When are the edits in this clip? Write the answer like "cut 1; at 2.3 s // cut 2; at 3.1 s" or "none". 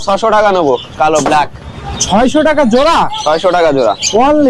none